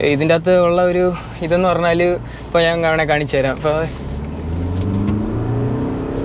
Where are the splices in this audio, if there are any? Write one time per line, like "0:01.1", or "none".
none